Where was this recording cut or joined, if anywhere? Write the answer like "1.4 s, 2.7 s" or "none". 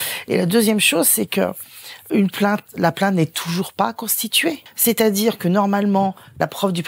2.0 s, 4.7 s